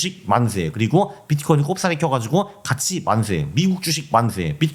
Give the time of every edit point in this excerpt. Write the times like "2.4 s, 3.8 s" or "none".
none